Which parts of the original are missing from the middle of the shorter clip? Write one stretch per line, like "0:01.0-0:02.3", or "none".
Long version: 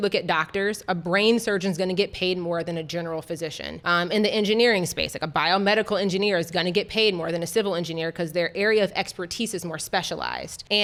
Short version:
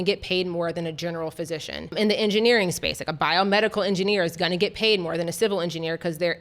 0:03.8-0:04.1